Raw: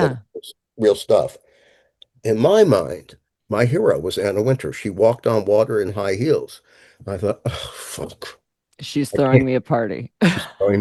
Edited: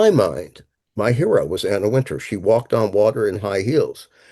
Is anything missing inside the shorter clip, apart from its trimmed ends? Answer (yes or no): no